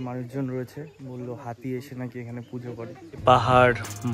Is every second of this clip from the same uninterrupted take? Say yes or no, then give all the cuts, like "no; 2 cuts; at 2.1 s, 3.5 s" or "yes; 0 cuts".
no; 1 cut; at 3.2 s